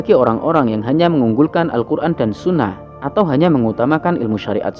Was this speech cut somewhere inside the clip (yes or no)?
no